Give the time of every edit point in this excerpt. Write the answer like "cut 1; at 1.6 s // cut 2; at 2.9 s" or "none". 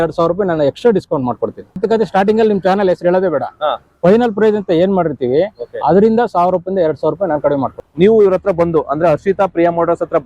cut 1; at 1.8 s // cut 2; at 7.8 s